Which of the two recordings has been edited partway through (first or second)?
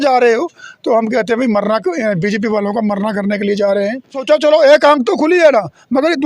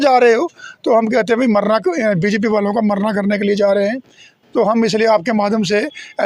first